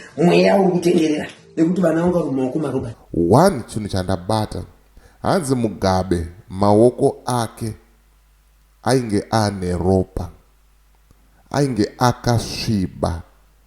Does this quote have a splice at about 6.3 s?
no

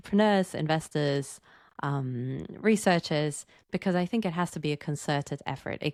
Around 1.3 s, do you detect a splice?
no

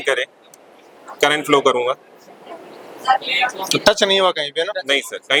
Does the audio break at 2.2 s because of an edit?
no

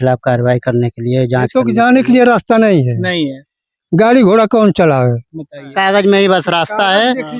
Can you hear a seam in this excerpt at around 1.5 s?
yes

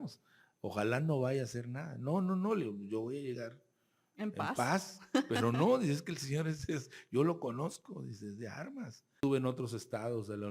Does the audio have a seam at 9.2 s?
yes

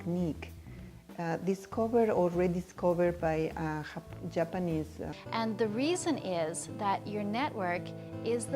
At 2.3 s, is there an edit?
no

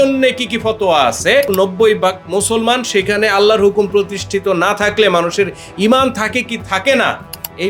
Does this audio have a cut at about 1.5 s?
yes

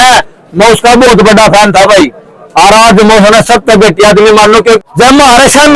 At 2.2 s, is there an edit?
no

